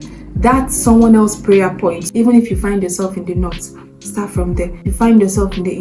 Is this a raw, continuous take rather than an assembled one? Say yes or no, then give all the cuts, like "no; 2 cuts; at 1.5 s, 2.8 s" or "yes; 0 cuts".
no; 2 cuts; at 2.0 s, 4.8 s